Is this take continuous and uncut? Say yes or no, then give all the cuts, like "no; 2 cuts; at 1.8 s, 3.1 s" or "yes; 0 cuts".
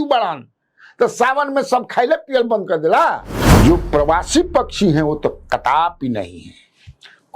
no; 1 cut; at 3.3 s